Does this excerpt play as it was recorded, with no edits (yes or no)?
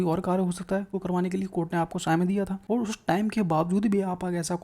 no